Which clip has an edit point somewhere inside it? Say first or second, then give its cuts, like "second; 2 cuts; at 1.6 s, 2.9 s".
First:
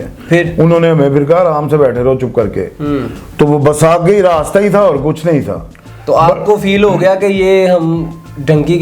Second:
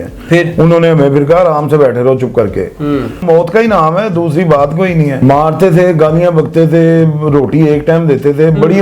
second; 2 cuts; at 3.2 s, 5.2 s